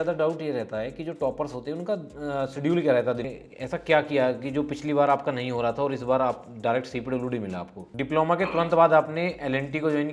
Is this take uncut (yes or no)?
no